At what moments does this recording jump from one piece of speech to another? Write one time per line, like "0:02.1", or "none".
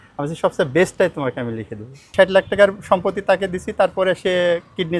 0:02.1